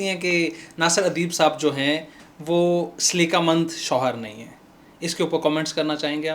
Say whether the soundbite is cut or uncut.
uncut